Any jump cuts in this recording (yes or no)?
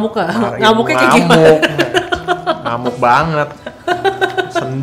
no